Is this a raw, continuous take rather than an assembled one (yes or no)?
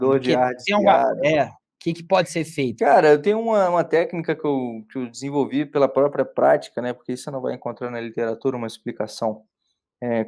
no